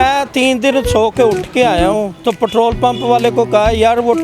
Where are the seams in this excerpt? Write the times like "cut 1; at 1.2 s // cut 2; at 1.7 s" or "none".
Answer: cut 1; at 2.1 s